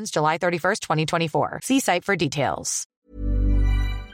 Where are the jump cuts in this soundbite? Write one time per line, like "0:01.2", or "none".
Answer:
0:02.9